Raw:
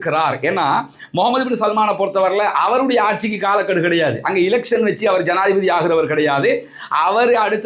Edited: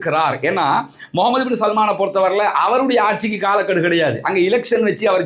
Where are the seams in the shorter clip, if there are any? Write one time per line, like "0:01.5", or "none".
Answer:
none